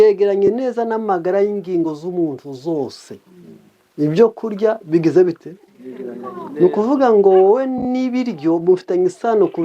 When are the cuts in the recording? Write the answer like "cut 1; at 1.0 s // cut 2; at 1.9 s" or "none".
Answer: none